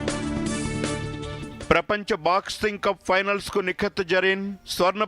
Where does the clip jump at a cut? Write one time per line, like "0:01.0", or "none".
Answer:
0:00.9